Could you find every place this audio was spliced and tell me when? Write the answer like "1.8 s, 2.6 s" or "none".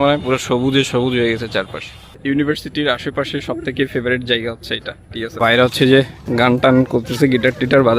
2.2 s, 5.4 s